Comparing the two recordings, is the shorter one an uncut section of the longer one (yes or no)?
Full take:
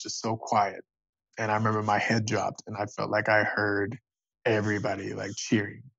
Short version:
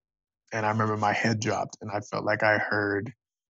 yes